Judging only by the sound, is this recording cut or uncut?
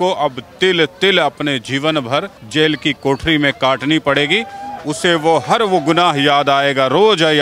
uncut